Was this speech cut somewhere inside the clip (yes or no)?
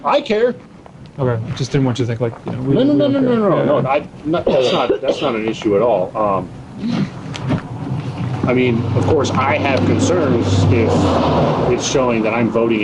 no